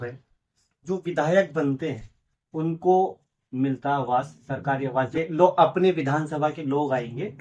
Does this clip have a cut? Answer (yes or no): yes